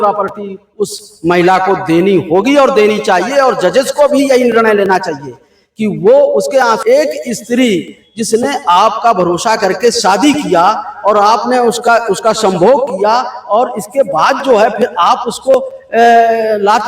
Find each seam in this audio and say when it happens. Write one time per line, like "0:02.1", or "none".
0:06.8